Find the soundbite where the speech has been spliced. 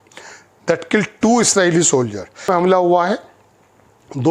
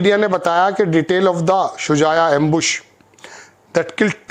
first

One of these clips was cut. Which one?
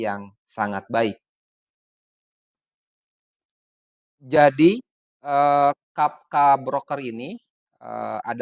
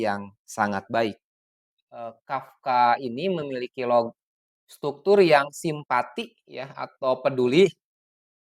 second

